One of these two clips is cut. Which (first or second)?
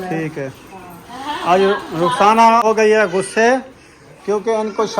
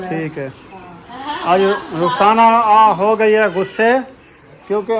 first